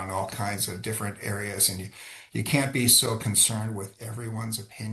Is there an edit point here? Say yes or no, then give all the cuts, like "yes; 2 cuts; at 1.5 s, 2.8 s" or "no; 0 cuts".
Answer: no; 0 cuts